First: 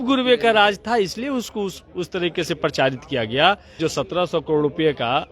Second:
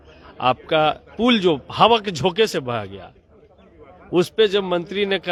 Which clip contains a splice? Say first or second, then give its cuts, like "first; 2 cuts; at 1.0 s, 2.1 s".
first; 1 cut; at 3.8 s